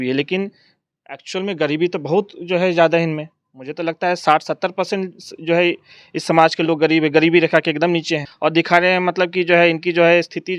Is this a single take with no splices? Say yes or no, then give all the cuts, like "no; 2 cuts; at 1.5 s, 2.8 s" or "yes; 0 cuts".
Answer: no; 1 cut; at 8.3 s